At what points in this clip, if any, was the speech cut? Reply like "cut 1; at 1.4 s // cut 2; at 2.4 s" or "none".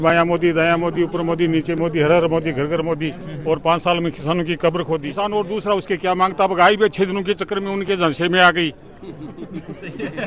cut 1; at 5.1 s